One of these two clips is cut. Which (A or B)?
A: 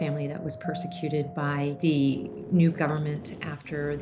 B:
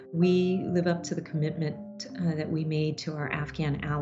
A